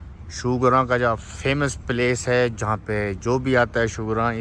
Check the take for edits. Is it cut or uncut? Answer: uncut